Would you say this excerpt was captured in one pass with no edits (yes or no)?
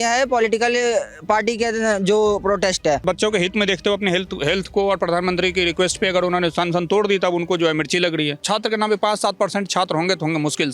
no